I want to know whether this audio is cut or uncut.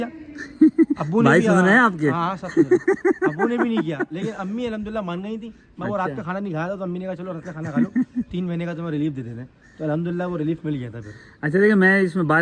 uncut